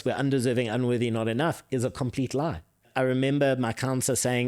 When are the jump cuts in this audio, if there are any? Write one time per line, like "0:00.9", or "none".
0:02.8

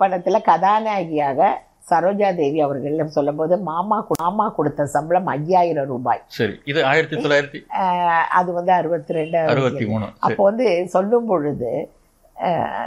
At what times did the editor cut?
none

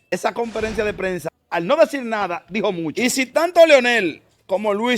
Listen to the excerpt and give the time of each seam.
0:01.3
0:02.9

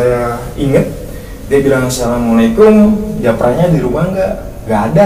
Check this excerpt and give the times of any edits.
none

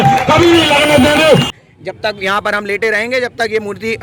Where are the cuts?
0:01.5

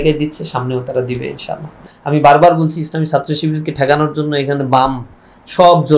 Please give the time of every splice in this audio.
0:01.8

